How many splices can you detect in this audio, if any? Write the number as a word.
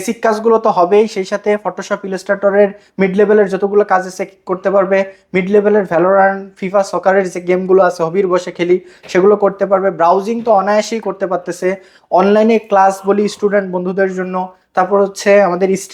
zero